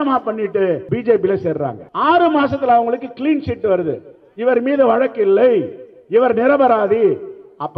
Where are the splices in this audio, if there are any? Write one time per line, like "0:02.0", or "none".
0:00.8
0:01.8